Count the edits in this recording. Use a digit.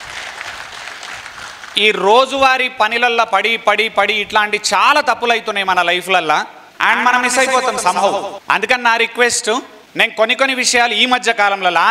3